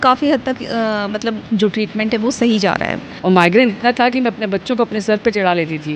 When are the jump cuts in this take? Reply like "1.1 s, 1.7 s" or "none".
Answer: 1.4 s, 3.1 s